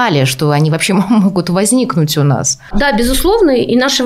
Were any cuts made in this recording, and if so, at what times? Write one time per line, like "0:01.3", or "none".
none

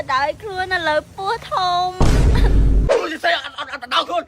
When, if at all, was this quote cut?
0:02.9

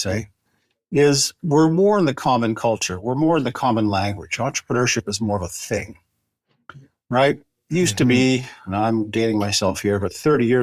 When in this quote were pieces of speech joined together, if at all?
none

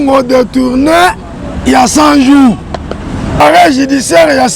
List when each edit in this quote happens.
0:03.4

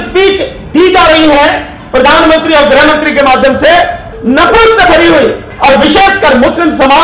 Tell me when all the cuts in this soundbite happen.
0:04.1
0:05.5

